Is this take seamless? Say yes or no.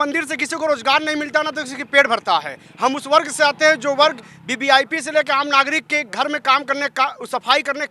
yes